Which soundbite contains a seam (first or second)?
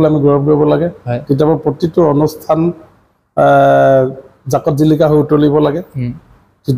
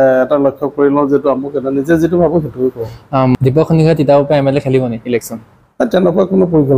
second